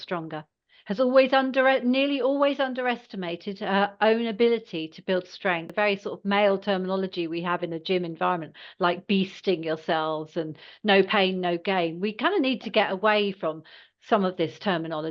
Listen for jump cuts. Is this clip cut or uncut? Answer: cut